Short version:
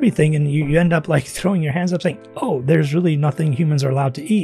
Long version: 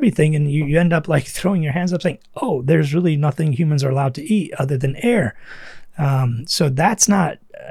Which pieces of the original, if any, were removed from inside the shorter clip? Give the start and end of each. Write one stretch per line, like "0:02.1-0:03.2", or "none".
none